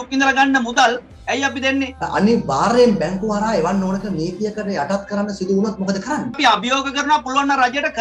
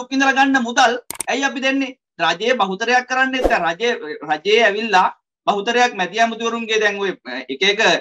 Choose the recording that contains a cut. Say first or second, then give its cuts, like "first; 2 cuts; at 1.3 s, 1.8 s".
first; 2 cuts; at 2.0 s, 6.4 s